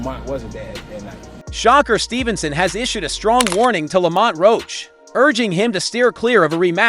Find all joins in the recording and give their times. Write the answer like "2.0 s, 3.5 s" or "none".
1.5 s